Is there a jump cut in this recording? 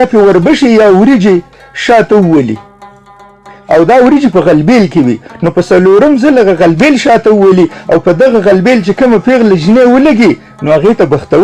no; 0 cuts

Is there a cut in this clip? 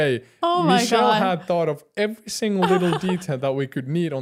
no; 0 cuts

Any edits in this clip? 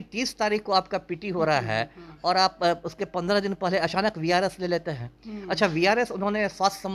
no; 0 cuts

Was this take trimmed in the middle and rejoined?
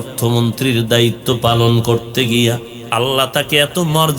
yes; 1 cut; at 2.7 s

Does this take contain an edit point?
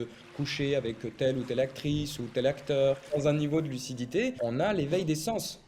yes; 2 cuts; at 3.0 s, 4.4 s

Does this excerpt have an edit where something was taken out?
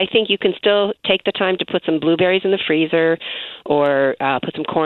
no; 0 cuts

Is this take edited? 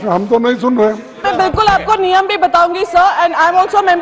yes; 1 cut; at 1.2 s

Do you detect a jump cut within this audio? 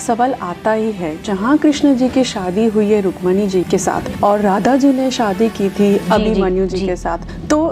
yes; 2 cuts; at 3.7 s, 6.0 s

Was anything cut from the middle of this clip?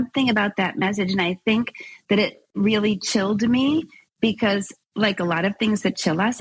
no; 0 cuts

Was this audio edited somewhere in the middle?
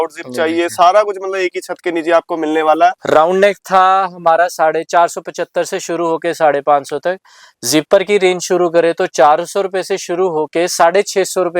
yes; 1 cut; at 3.0 s

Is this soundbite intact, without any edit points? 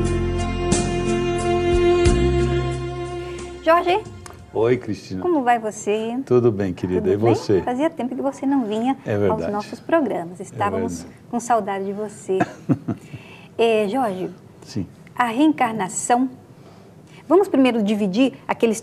no; 1 cut; at 10.5 s

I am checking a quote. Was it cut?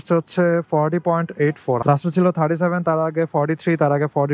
no; 0 cuts

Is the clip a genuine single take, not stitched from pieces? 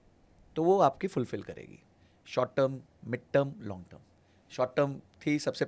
yes; 0 cuts

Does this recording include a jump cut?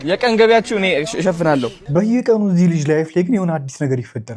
yes; 1 cut; at 1.8 s

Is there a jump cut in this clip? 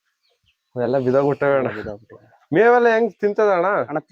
no; 0 cuts

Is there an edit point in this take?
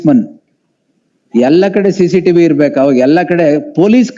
no; 0 cuts

